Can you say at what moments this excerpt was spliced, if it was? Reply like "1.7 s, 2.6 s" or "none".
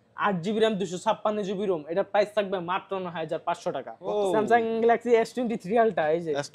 3.9 s